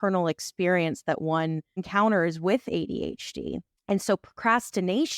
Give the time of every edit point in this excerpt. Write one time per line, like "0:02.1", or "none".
0:03.7